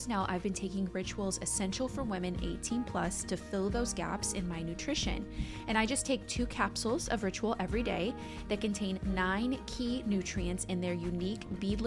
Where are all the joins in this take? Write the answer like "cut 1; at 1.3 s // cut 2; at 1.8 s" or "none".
none